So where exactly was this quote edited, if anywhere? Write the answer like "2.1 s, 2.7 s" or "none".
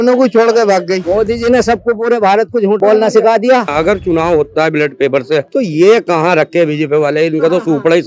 1.0 s, 3.7 s